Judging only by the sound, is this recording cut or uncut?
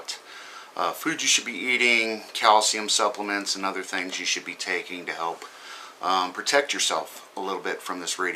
cut